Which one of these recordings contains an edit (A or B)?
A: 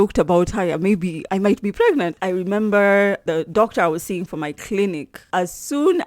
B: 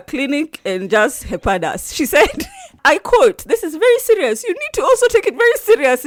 A